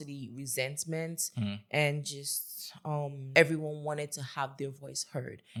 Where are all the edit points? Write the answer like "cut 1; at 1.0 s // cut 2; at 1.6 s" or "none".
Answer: none